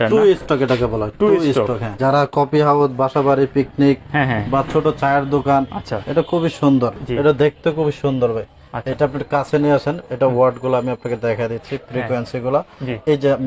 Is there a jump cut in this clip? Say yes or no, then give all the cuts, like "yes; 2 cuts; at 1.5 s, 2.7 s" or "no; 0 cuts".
yes; 2 cuts; at 1.9 s, 7.0 s